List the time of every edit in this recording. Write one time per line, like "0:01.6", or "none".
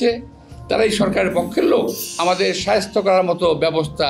0:02.0